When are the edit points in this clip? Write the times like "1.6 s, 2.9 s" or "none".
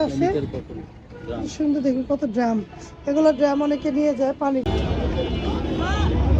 4.7 s